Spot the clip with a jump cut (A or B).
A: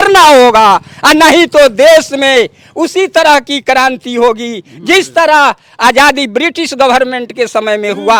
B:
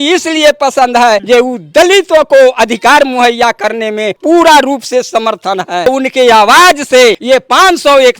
B